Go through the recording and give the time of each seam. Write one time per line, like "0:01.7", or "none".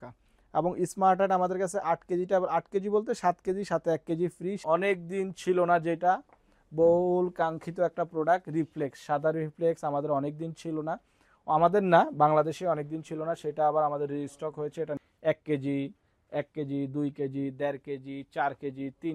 0:04.6
0:15.0